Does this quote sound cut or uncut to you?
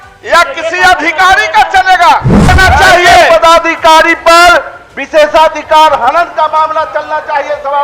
cut